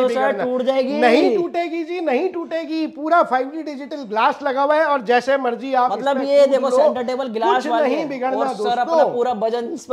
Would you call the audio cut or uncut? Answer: uncut